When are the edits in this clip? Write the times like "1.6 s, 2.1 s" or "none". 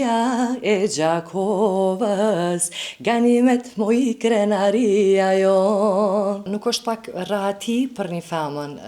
6.5 s